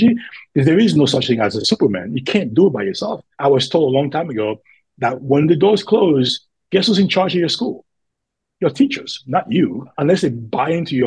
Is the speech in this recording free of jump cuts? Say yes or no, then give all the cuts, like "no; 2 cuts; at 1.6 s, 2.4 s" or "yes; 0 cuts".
no; 2 cuts; at 3.3 s, 9.9 s